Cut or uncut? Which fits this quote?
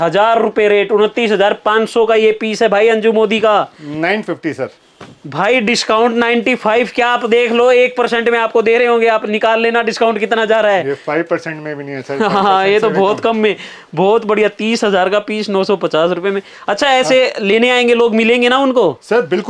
uncut